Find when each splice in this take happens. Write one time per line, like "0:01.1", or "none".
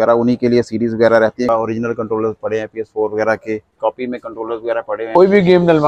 0:01.5
0:03.8
0:05.1